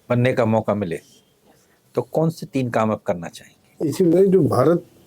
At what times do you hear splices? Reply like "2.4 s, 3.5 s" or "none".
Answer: 3.6 s